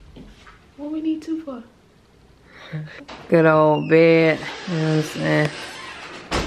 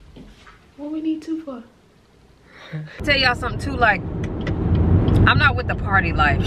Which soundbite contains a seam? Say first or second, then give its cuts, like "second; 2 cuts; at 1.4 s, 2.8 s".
second; 1 cut; at 3.0 s